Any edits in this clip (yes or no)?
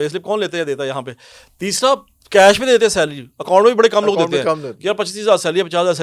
no